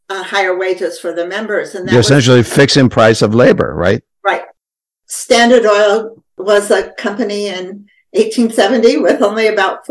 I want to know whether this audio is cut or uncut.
cut